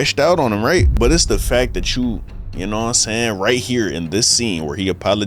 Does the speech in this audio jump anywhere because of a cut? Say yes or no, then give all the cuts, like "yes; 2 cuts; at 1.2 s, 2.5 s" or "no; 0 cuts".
yes; 1 cut; at 0.9 s